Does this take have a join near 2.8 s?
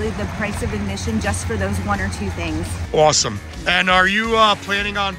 no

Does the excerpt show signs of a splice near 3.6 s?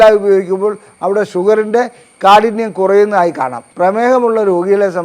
yes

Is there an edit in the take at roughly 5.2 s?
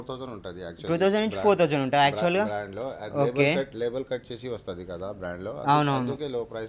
no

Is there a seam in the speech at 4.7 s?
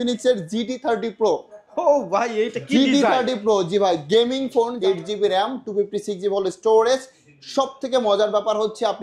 yes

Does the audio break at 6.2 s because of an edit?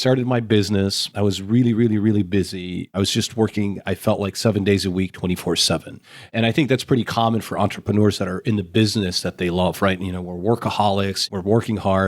no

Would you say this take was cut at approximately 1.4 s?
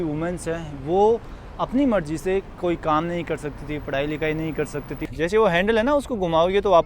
no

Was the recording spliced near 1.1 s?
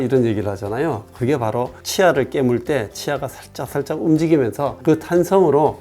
no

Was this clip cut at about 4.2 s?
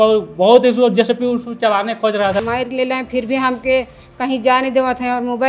no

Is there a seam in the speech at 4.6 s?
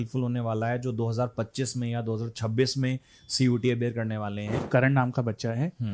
yes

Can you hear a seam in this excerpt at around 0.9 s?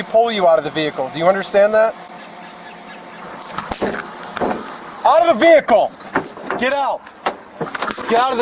no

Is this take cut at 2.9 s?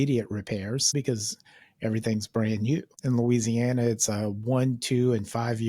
yes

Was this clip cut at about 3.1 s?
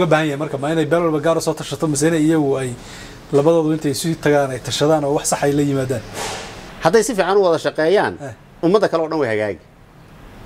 no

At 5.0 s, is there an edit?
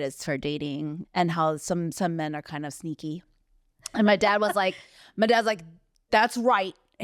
no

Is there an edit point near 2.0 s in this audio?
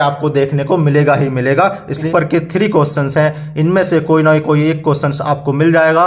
yes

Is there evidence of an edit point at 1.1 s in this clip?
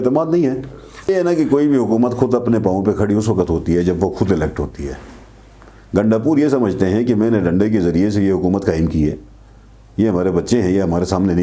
yes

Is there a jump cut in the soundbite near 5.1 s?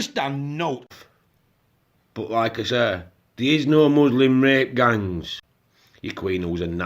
yes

